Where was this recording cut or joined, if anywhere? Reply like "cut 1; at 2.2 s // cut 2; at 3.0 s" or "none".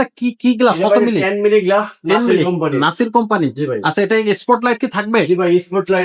none